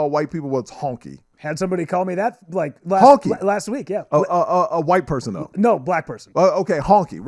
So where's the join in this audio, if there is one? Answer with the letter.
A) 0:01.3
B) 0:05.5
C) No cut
A